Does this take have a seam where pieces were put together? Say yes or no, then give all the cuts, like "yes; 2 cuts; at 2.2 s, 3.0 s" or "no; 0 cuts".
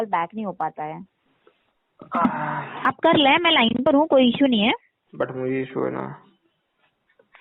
no; 0 cuts